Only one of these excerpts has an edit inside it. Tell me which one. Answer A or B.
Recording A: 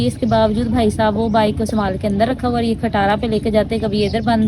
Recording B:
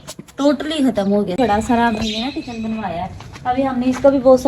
B